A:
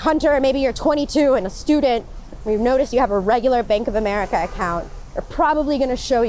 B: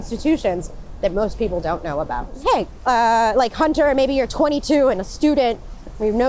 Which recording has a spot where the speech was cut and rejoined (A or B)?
B